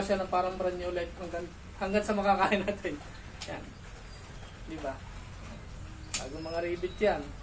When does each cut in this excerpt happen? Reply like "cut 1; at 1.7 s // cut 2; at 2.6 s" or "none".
none